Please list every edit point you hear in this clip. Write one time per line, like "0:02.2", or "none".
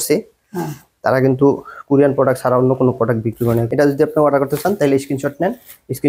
0:03.7